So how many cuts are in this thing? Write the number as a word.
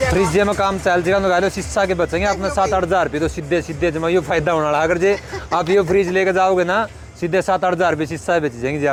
zero